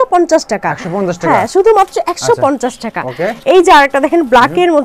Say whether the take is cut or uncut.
uncut